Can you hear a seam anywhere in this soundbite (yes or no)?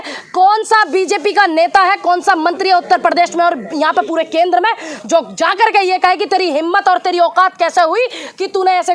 no